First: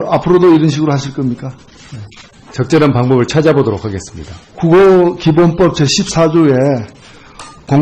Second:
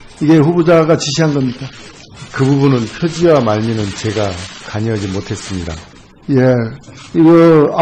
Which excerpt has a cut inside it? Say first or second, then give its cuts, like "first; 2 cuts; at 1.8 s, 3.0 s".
first; 1 cut; at 6.8 s